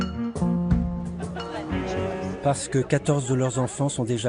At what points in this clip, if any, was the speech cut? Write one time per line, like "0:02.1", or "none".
0:01.0